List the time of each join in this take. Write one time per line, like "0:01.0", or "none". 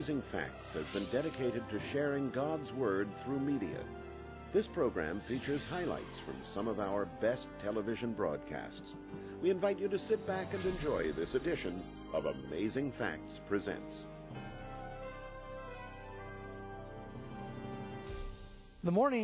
0:10.8